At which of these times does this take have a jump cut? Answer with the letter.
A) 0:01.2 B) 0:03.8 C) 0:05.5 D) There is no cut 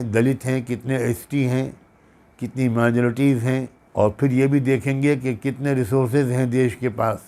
B